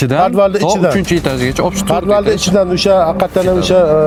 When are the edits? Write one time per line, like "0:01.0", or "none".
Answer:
none